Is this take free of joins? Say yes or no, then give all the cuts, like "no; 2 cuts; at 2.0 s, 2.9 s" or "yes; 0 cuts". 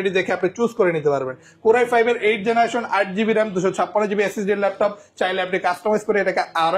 yes; 0 cuts